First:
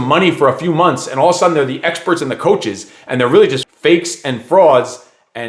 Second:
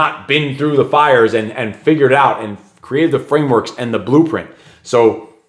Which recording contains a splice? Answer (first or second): first